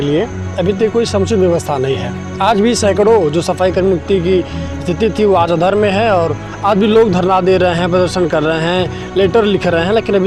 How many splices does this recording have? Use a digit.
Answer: 0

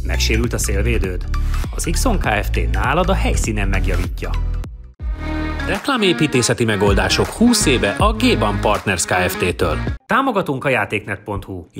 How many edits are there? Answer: 2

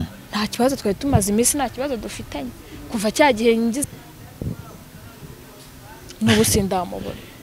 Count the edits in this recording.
1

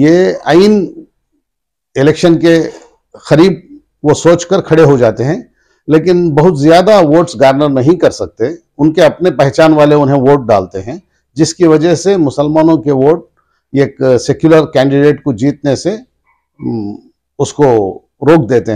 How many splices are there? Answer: 0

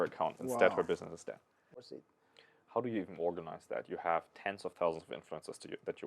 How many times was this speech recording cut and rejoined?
1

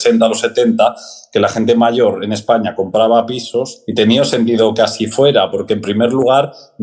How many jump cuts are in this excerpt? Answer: 1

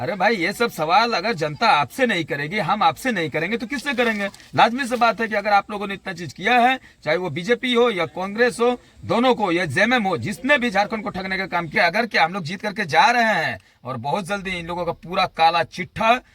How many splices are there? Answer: 1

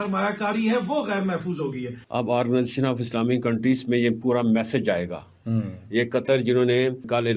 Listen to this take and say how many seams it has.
1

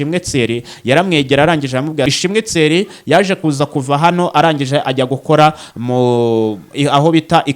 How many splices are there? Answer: 1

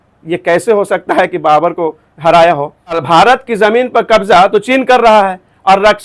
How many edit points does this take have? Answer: 1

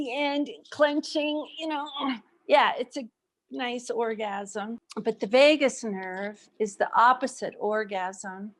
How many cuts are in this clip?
1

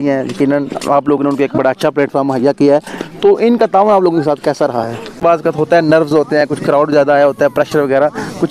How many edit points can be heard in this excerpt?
1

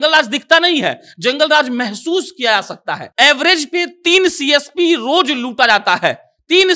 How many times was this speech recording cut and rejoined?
1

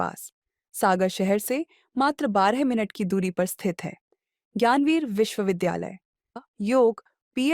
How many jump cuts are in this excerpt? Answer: 1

